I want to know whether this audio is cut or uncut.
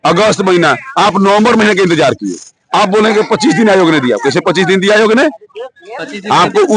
uncut